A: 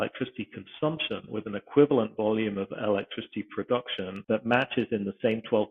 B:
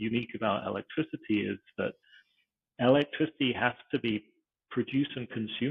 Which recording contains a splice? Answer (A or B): A